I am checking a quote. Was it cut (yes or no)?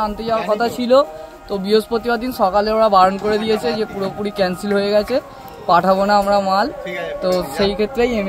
no